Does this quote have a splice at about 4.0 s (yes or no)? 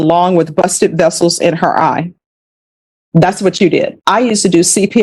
yes